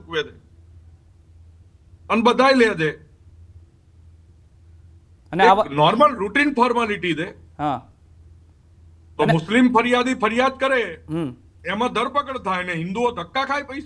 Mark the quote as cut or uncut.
uncut